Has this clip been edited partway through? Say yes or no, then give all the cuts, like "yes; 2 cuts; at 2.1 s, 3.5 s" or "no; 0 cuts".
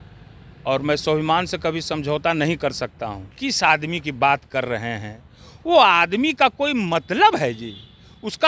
yes; 1 cut; at 3.3 s